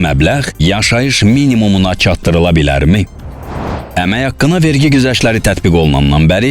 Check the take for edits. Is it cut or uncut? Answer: cut